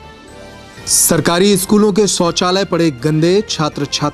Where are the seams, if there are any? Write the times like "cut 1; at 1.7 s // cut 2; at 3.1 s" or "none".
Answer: cut 1; at 1.1 s